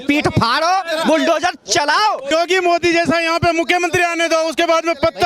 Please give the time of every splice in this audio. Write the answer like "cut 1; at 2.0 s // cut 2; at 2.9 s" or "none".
cut 1; at 2.3 s